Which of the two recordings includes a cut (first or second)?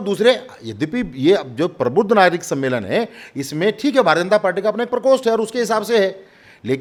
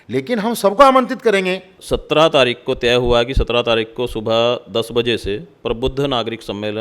second